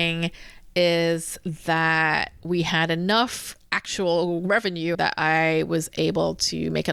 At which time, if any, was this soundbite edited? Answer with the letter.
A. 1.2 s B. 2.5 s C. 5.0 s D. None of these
C